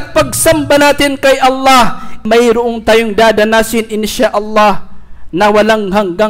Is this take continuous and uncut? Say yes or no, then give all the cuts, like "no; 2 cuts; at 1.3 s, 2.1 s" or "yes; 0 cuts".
no; 1 cut; at 2.2 s